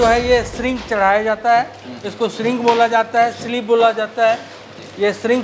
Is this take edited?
no; 0 cuts

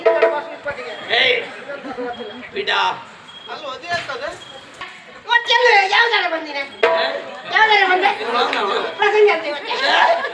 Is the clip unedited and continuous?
no; 1 cut; at 5.0 s

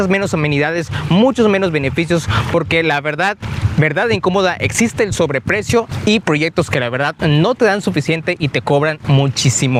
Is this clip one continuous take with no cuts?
yes; 0 cuts

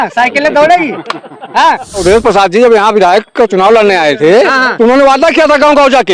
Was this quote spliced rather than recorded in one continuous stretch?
yes; 1 cut; at 2.0 s

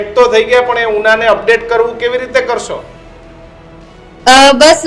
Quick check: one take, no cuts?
yes; 0 cuts

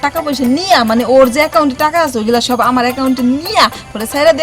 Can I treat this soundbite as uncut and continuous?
yes; 0 cuts

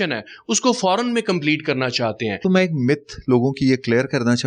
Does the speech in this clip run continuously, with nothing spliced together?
no; 1 cut; at 2.4 s

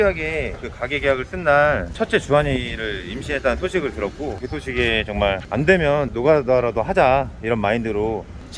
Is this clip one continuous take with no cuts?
yes; 0 cuts

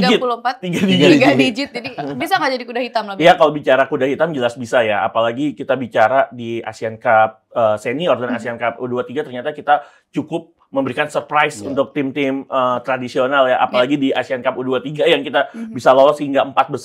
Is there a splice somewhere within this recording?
no; 0 cuts

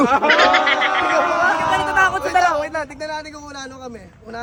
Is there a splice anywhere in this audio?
no; 0 cuts

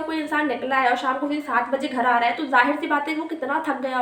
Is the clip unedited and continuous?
yes; 0 cuts

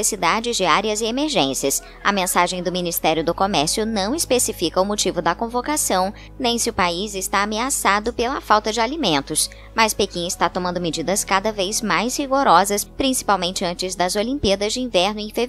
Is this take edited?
yes; 1 cut; at 2.6 s

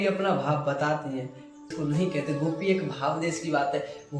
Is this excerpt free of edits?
no; 1 cut; at 1.7 s

